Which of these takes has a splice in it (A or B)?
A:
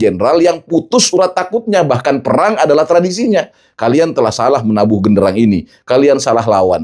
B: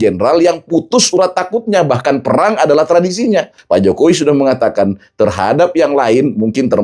B